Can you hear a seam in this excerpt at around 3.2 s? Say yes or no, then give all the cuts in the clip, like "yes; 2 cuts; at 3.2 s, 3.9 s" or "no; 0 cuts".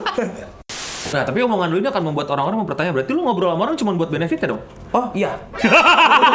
no; 2 cuts; at 0.9 s, 5.4 s